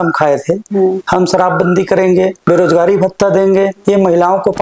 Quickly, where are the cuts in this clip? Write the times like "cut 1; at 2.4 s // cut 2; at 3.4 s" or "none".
cut 1; at 2.4 s // cut 2; at 3.8 s